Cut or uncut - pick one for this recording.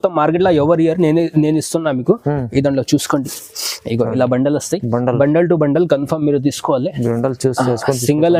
uncut